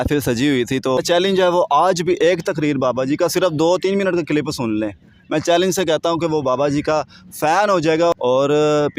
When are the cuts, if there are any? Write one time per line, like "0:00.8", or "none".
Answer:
0:01.0
0:08.1